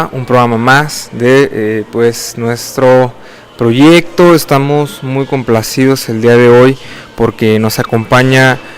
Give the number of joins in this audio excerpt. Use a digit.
1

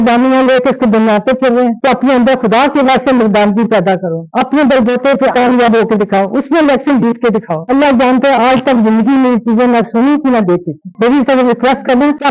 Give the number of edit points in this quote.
3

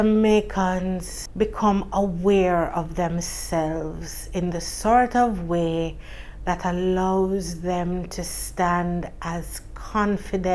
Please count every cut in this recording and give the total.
1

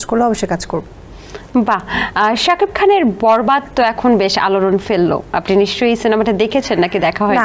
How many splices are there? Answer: 0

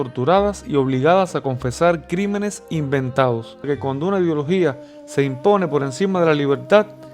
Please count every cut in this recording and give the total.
1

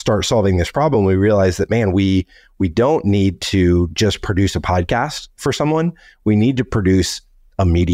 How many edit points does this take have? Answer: 0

